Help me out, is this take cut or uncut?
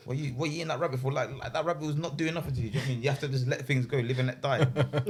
uncut